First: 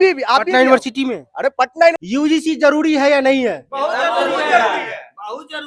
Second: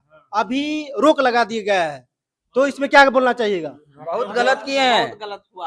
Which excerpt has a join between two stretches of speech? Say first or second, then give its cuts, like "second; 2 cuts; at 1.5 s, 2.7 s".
first; 1 cut; at 1.9 s